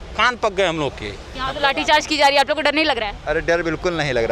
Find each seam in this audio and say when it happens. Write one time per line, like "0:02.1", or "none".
0:01.3